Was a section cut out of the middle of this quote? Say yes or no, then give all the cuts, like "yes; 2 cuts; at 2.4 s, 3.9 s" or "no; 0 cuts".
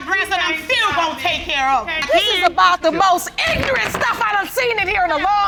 no; 0 cuts